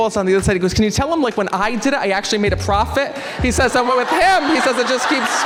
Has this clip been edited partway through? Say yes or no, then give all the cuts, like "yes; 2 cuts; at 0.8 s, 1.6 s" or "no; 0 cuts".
no; 0 cuts